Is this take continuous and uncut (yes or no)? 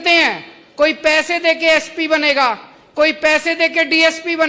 yes